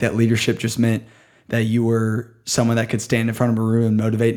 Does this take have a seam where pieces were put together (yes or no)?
no